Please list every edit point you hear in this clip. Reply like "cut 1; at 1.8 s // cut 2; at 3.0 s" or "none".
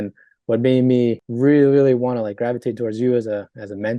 cut 1; at 1.3 s

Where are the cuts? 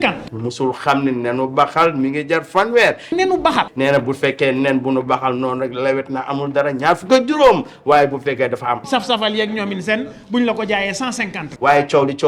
none

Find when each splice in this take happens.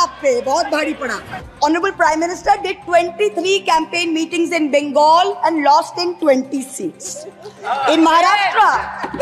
cut 1; at 1.4 s

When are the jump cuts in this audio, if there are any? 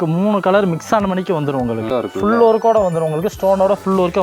cut 1; at 1.9 s

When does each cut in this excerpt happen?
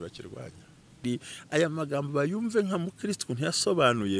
cut 1; at 1.0 s

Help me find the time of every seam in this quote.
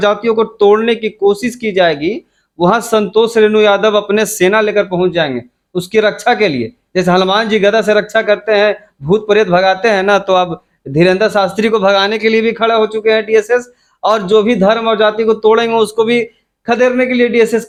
none

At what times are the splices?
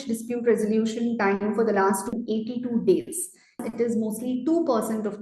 cut 1; at 3.6 s

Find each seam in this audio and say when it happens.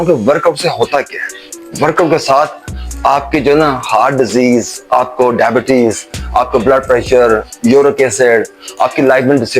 none

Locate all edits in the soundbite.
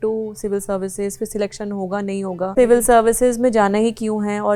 cut 1; at 2.5 s

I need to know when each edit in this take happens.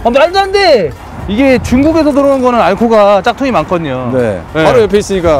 cut 1; at 0.9 s // cut 2; at 4.4 s

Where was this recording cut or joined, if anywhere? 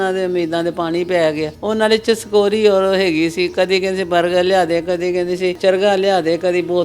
cut 1; at 1.5 s // cut 2; at 5.6 s

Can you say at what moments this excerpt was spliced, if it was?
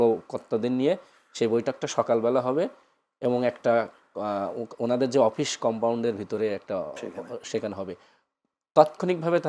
none

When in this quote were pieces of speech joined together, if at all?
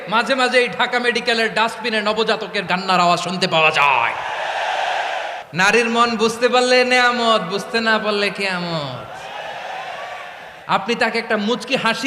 cut 1; at 2.7 s // cut 2; at 5.4 s // cut 3; at 10.5 s

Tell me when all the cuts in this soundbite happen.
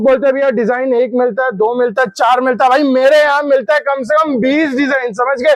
none

